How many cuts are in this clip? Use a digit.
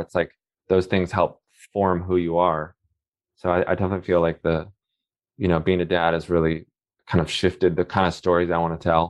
0